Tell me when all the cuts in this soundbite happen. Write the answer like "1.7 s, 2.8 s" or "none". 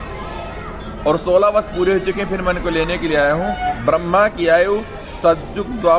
3.8 s